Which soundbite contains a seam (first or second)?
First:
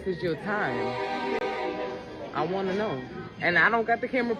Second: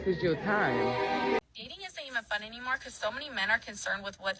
second